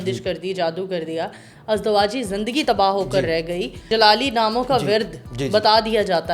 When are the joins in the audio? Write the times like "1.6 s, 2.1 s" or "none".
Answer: 3.8 s